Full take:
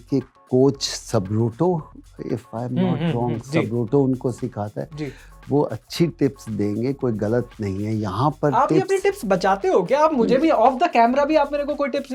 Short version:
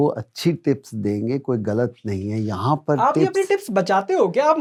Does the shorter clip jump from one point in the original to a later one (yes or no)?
no